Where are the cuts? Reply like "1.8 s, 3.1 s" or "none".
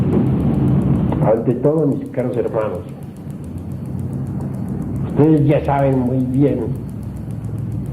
1.9 s